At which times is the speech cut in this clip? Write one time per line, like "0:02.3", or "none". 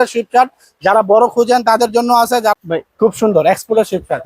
0:02.5